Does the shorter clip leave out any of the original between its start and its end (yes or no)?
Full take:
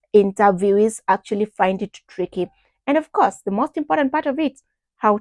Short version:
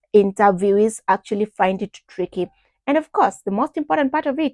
no